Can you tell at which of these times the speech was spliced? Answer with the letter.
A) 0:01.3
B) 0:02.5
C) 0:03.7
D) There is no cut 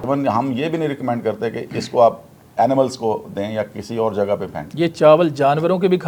D